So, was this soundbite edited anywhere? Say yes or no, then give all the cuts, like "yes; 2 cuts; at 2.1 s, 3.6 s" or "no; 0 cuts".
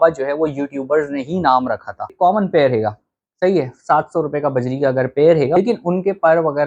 yes; 2 cuts; at 2.1 s, 5.6 s